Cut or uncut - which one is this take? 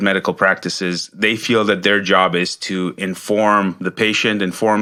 uncut